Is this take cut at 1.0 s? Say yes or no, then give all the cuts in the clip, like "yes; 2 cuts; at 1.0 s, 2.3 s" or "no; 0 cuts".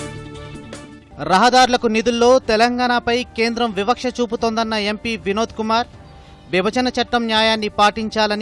no; 0 cuts